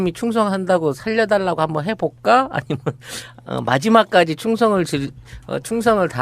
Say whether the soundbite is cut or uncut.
cut